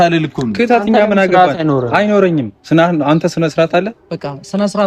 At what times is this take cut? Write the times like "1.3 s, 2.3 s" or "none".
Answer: none